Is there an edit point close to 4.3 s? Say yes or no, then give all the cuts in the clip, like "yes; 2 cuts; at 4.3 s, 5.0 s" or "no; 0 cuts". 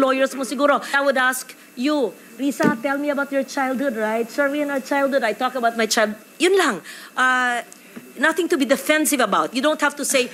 no; 1 cut; at 1.0 s